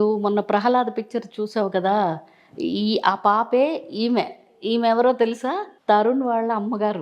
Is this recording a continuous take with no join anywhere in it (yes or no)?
no